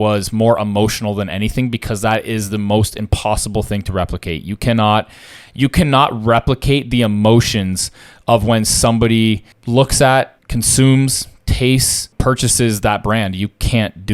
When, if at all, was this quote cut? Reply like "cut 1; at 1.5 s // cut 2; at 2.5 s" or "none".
cut 1; at 9.5 s // cut 2; at 10.4 s // cut 3; at 12.1 s

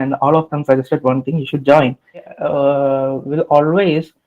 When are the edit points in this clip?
cut 1; at 2.4 s

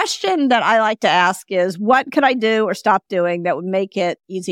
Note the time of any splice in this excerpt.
none

